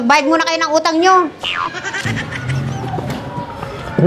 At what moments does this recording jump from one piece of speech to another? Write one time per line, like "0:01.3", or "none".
none